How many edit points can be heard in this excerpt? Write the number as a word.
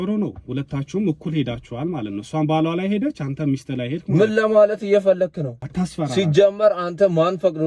one